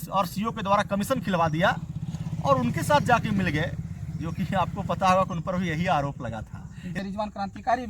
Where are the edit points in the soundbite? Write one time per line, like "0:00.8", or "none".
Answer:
0:07.0